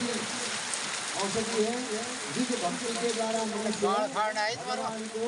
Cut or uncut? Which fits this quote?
uncut